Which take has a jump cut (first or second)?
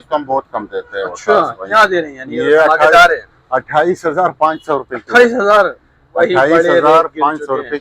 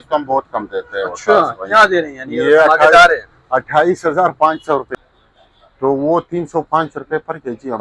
second